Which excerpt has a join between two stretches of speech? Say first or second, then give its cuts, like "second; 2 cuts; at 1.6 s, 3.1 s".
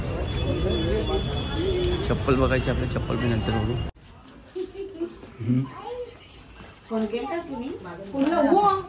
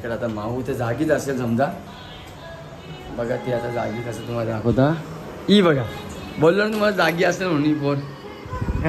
first; 1 cut; at 3.9 s